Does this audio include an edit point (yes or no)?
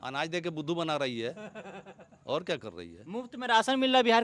no